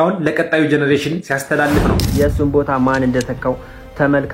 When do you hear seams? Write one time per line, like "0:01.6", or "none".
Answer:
0:02.0